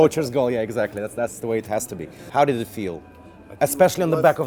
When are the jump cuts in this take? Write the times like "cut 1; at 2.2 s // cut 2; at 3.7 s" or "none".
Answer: none